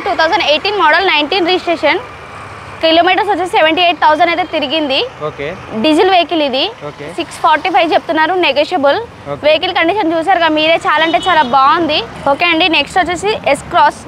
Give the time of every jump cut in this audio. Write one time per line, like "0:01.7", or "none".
none